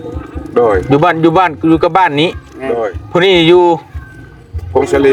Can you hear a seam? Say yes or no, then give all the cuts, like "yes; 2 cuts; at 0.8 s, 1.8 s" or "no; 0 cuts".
no; 0 cuts